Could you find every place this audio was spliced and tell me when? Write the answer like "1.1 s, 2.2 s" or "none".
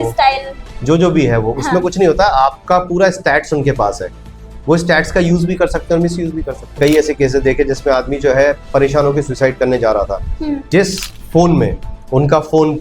6.8 s, 10.6 s

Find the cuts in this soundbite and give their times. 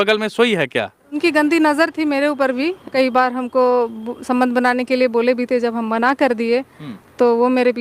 1.2 s, 2.8 s

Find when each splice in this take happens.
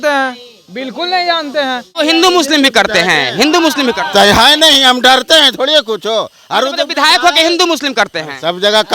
1.9 s

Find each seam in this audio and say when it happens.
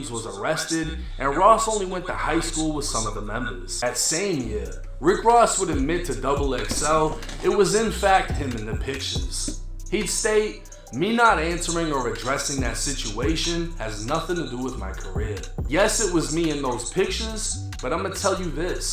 3.7 s, 15.5 s

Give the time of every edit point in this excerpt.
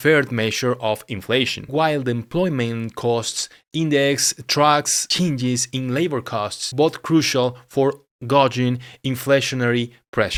none

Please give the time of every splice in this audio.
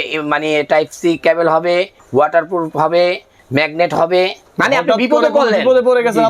2.0 s, 4.5 s

